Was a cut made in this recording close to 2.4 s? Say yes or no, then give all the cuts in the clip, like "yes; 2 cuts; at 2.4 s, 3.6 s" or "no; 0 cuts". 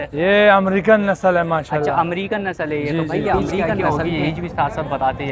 no; 1 cut; at 3.7 s